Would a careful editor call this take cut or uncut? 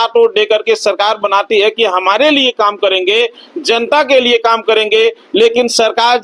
uncut